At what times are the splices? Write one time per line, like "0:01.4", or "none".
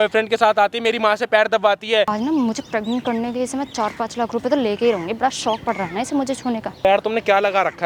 0:02.1
0:06.8